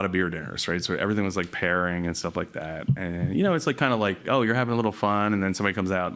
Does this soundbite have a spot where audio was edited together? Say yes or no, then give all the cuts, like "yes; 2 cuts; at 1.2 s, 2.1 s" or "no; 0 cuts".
no; 0 cuts